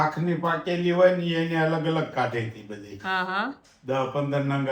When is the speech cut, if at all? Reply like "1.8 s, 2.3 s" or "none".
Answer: none